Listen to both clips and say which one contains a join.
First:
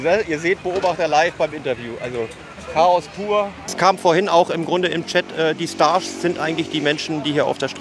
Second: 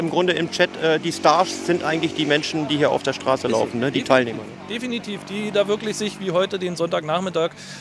first; 1 cut; at 3.6 s

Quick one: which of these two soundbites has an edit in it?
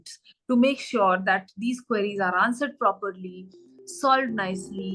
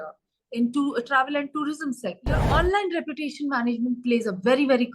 second; 1 cut; at 2.5 s

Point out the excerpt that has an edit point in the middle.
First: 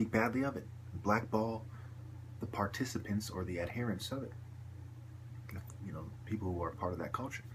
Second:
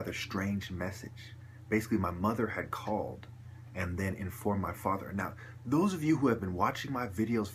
second; 1 cut; at 1.6 s

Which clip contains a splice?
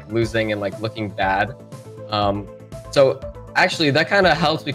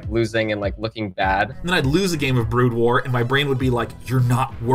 second; 1 cut; at 1.6 s

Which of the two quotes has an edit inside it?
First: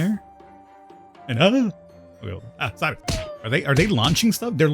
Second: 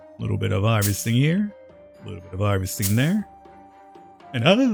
first; 1 cut; at 3.0 s

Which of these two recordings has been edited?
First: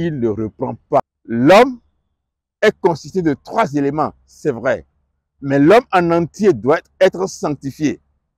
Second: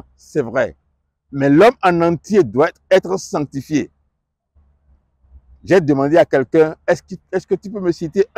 first; 1 cut; at 1.0 s

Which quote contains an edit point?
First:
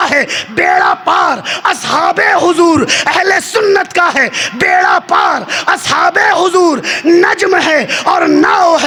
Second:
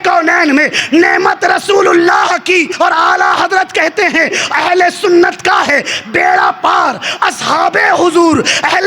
second; 1 cut; at 2.7 s

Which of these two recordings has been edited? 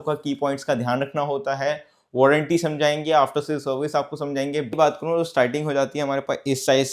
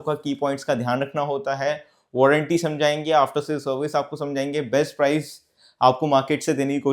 first; 1 cut; at 4.7 s

